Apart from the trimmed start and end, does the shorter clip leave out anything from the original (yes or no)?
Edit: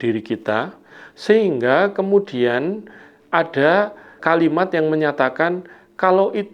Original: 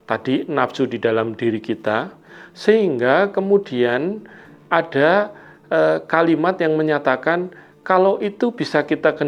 yes